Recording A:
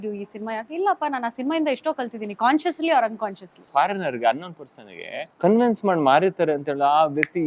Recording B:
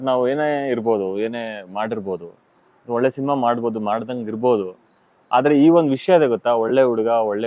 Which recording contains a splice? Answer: A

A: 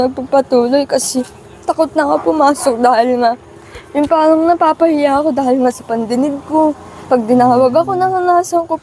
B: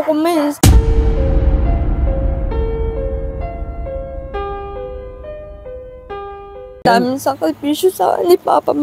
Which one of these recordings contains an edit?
B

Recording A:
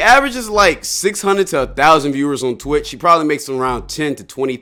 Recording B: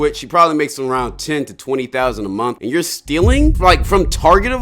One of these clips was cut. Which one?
B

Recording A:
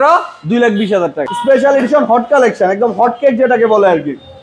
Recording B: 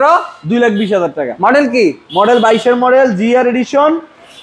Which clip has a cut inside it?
A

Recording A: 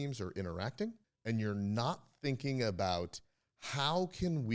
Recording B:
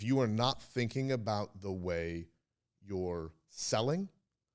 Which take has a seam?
A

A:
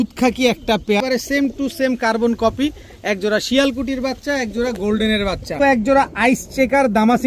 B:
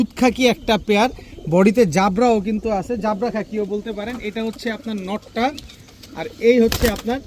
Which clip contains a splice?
A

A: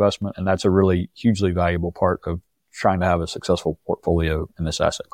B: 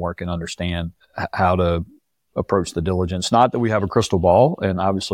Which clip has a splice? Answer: B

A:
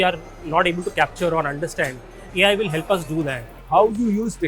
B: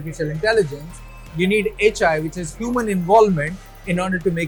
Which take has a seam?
A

